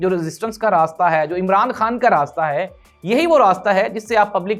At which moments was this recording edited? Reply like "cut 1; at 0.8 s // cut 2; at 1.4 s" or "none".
none

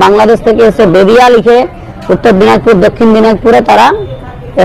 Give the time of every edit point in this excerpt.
none

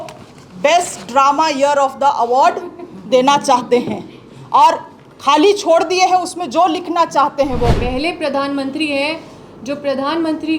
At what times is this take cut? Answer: cut 1; at 7.7 s

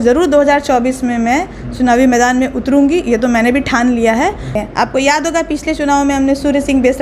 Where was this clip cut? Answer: cut 1; at 4.5 s

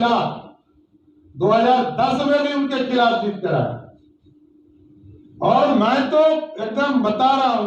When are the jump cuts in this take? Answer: none

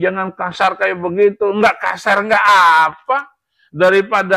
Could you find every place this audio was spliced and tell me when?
none

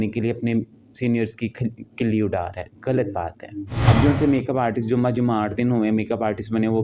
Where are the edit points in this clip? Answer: cut 1; at 3.8 s

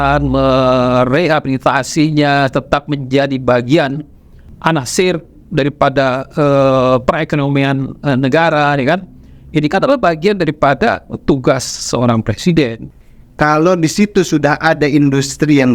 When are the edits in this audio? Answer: cut 1; at 4.4 s // cut 2; at 12.8 s

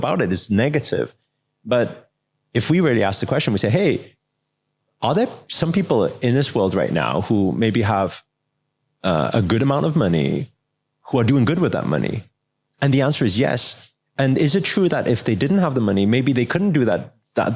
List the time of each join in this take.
none

